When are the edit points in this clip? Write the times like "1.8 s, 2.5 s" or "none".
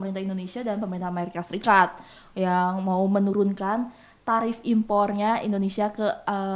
none